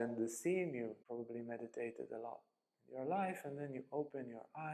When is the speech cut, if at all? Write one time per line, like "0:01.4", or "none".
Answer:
0:01.0